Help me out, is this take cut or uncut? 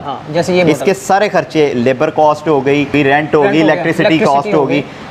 cut